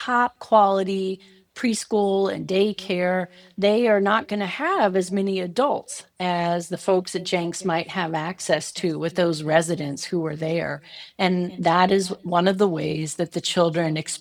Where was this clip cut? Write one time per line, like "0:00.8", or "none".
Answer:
none